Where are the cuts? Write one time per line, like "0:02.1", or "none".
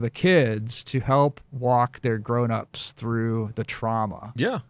none